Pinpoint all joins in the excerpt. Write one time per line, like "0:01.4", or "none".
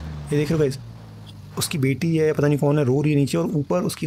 none